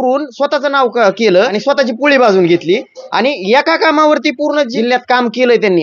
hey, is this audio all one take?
no; 2 cuts; at 1.6 s, 4.7 s

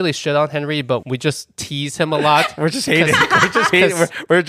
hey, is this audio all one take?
yes; 0 cuts

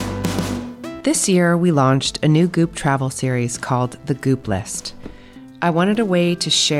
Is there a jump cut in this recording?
yes; 1 cut; at 1.0 s

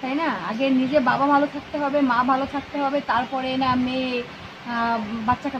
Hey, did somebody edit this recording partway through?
no; 0 cuts

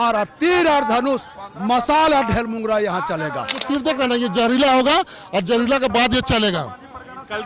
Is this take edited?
yes; 1 cut; at 3.6 s

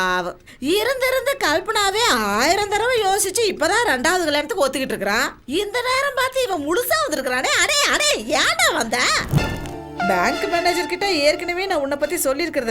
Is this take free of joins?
no; 1 cut; at 9.4 s

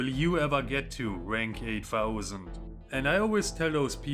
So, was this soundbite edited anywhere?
yes; 1 cut; at 2.6 s

